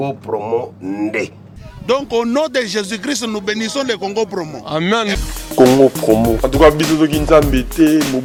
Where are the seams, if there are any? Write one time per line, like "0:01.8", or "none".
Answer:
none